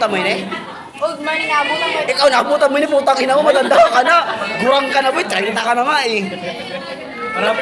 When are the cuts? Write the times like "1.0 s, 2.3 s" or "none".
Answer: none